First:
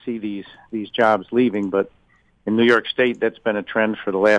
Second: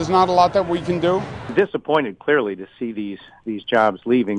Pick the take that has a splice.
second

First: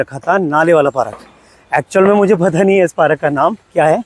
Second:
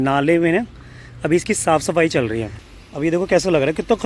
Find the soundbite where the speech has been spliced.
second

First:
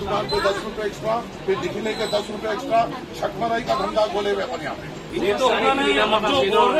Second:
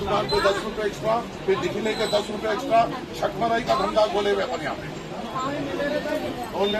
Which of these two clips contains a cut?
first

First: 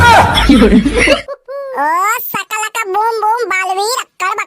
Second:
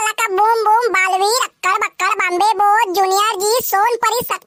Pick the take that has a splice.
first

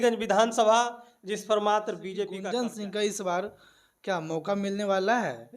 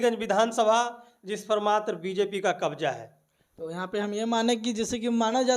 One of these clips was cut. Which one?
first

